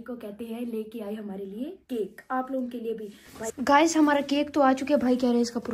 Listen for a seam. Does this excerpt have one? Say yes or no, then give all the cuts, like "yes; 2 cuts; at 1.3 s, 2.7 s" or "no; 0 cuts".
yes; 1 cut; at 3.5 s